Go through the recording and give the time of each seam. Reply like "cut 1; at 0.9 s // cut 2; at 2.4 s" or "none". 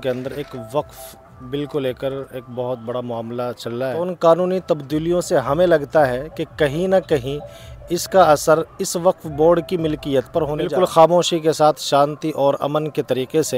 cut 1; at 4.0 s // cut 2; at 10.7 s

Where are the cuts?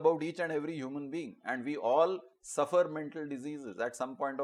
none

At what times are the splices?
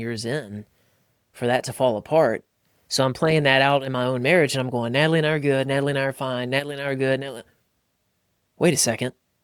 none

